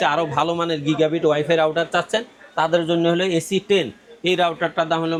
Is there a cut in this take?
no; 0 cuts

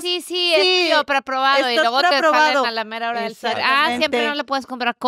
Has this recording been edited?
no; 0 cuts

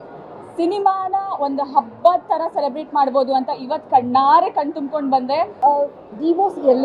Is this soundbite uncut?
no; 1 cut; at 5.6 s

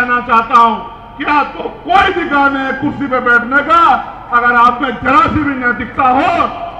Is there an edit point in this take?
no; 0 cuts

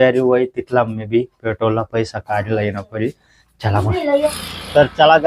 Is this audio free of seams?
no; 1 cut; at 4.4 s

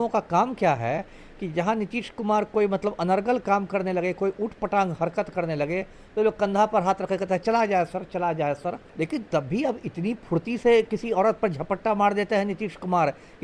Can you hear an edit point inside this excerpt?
yes; 1 cut; at 8.8 s

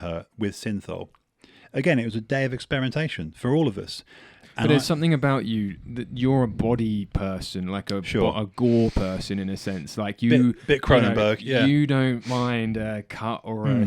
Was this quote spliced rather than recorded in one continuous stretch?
no; 0 cuts

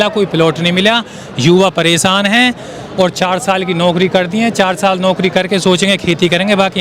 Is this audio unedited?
yes; 0 cuts

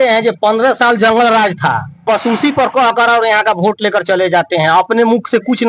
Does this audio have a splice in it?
yes; 1 cut; at 2.0 s

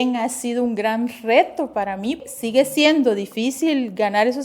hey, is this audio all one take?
no; 1 cut; at 2.2 s

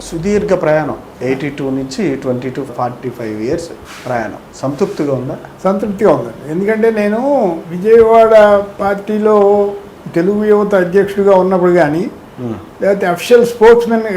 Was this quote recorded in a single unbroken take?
yes; 0 cuts

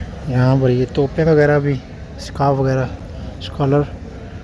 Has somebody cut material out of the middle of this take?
no; 0 cuts

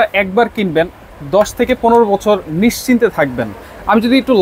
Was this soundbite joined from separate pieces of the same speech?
no; 0 cuts

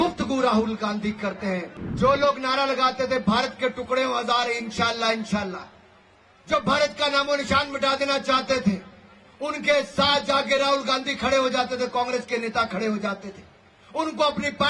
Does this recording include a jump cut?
yes; 1 cut; at 1.8 s

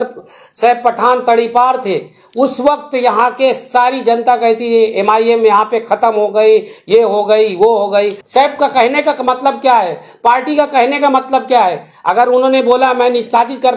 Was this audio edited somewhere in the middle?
yes; 1 cut; at 8.2 s

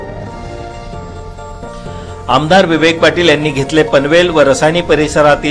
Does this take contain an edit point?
yes; 1 cut; at 1.5 s

